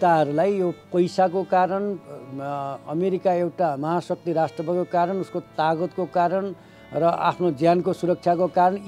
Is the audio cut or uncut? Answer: uncut